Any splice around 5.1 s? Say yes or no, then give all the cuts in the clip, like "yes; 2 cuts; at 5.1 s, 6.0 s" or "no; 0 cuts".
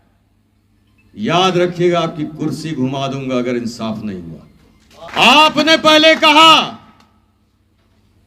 yes; 1 cut; at 5.1 s